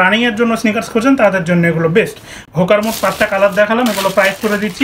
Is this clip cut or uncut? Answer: uncut